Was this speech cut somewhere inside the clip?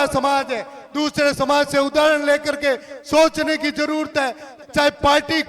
yes; 1 cut; at 4.5 s

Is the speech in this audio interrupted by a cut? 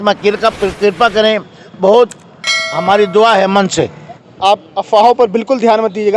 yes; 1 cut; at 4.2 s

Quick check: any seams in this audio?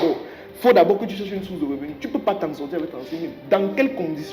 no; 0 cuts

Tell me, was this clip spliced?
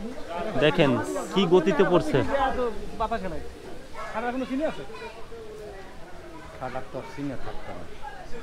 no; 0 cuts

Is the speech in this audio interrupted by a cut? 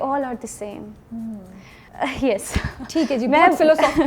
no; 0 cuts

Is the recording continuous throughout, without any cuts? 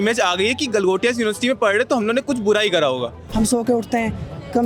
no; 1 cut; at 3.2 s

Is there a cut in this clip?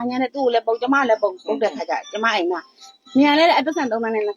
no; 0 cuts

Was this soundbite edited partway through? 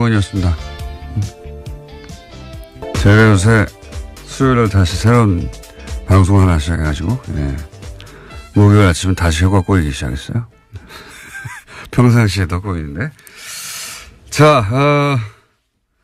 no; 0 cuts

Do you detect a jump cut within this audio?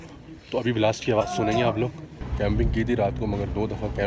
yes; 1 cut; at 2.2 s

